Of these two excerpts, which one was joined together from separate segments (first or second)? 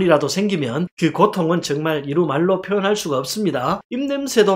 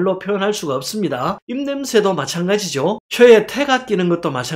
second